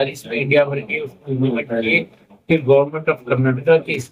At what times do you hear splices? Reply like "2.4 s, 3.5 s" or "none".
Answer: none